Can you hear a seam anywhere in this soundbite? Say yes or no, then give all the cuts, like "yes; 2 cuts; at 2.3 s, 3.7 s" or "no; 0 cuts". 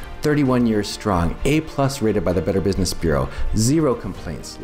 no; 0 cuts